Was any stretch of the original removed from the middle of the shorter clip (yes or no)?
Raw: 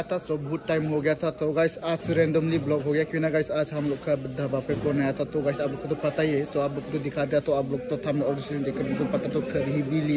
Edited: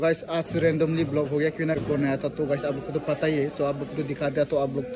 yes